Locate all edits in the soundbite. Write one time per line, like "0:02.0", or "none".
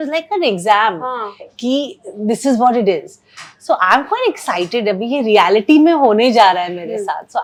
none